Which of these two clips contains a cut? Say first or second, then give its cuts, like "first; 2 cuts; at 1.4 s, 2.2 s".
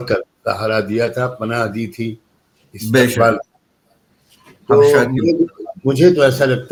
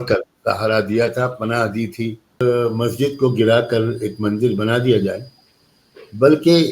second; 1 cut; at 2.4 s